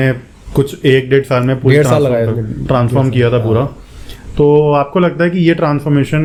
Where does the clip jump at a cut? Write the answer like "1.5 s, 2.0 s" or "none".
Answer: none